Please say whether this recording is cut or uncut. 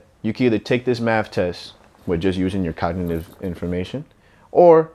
uncut